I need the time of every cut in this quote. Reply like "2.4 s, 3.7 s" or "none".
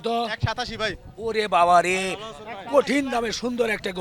none